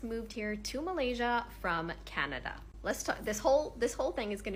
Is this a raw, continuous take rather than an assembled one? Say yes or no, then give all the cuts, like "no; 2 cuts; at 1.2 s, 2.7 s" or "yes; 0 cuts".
yes; 0 cuts